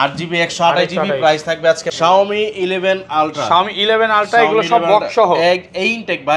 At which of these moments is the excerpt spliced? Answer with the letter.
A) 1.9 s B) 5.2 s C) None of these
A